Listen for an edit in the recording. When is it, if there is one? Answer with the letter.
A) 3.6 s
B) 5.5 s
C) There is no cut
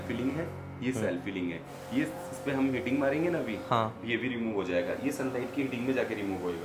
C